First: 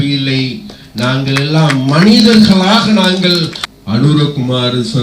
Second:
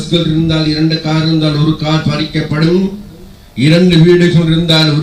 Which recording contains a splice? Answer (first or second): first